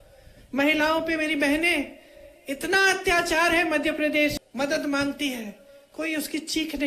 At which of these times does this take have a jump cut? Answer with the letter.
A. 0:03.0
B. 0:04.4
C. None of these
B